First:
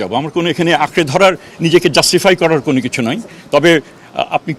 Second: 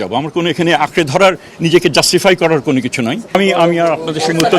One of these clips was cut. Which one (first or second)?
second